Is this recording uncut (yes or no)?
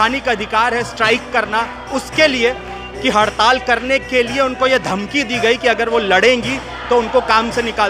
yes